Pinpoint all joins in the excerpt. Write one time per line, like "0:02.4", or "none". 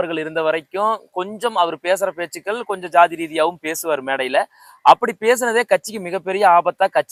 none